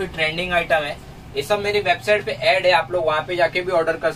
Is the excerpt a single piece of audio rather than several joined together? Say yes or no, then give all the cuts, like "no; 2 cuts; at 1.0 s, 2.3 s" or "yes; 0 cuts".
yes; 0 cuts